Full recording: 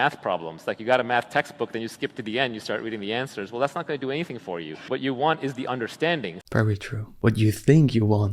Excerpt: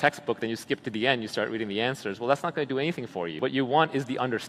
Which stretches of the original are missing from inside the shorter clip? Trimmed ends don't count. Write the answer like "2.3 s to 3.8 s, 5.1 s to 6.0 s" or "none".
4.6 s to 4.8 s